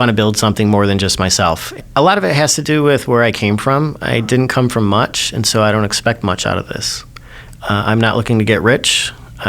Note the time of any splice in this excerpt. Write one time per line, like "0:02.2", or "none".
0:01.8